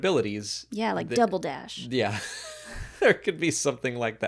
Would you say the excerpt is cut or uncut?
uncut